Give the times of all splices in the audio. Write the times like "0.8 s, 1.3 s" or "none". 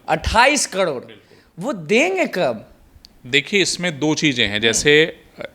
none